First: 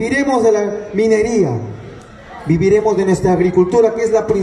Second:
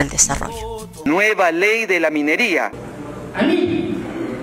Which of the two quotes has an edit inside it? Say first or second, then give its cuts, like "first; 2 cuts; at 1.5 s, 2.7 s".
second; 2 cuts; at 0.9 s, 3.1 s